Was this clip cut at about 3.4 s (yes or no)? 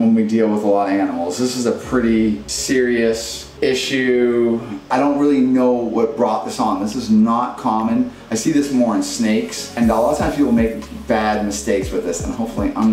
yes